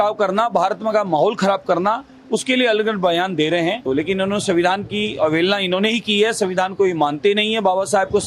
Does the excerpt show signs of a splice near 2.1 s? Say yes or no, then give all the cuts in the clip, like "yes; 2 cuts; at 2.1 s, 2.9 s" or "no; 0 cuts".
no; 1 cut; at 3.8 s